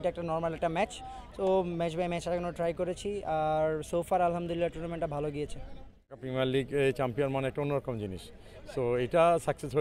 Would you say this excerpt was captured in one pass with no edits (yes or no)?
no